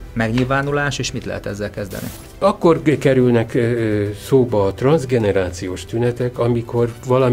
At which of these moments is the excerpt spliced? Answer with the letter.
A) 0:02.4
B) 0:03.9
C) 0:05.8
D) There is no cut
A